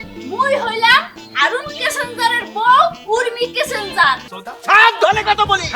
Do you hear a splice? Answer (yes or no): yes